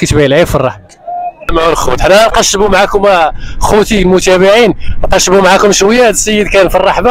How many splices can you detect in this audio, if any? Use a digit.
1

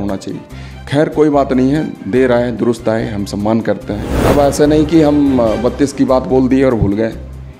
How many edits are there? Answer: 1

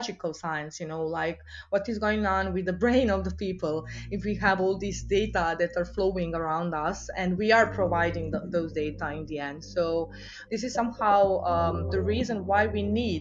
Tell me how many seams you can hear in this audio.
1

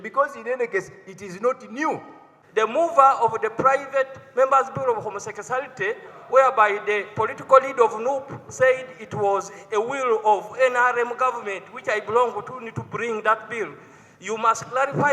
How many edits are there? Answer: 1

